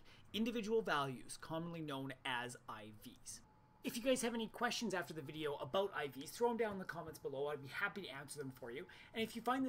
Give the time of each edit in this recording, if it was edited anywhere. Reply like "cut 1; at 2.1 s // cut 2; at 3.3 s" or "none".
none